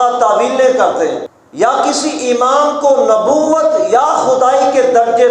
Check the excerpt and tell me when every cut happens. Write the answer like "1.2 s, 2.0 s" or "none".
1.4 s

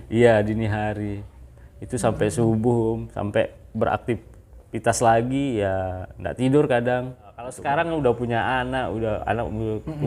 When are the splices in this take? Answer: 7.6 s

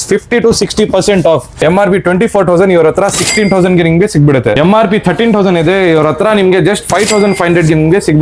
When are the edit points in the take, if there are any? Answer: 1.6 s, 4.6 s

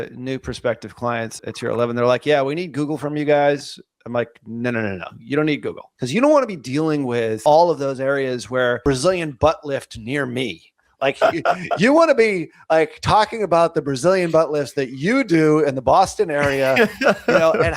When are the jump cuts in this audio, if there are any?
1.4 s, 5.9 s, 7.4 s, 8.8 s

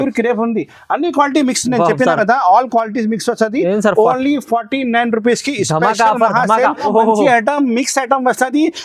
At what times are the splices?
6.8 s

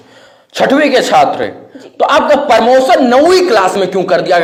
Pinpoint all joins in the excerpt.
none

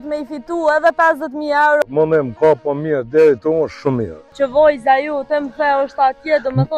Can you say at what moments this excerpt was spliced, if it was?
1.8 s, 4.2 s

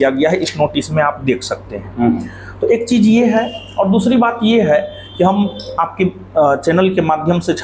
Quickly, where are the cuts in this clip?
none

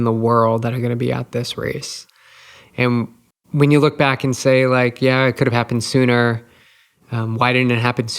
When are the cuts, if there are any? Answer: 3.3 s

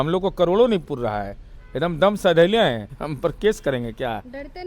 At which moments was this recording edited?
2.9 s

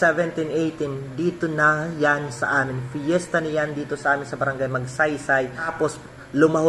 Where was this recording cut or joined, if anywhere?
5.7 s

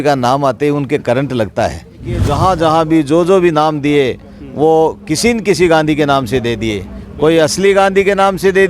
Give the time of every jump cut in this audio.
2.3 s

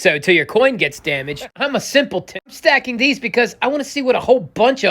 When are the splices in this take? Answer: 1.5 s, 2.6 s

